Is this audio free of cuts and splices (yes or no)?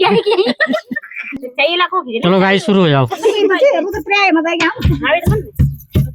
no